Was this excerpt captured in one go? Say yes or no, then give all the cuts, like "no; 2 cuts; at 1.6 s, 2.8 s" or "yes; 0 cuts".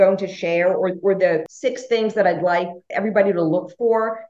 no; 2 cuts; at 1.5 s, 2.8 s